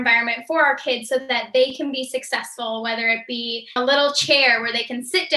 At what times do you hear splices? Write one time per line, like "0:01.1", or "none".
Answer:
0:03.8